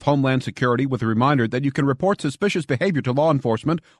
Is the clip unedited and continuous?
yes; 0 cuts

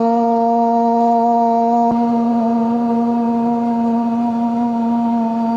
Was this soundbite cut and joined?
yes; 1 cut; at 1.9 s

